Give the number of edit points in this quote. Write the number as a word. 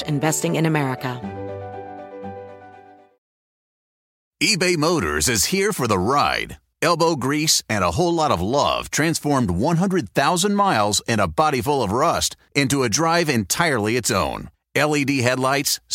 one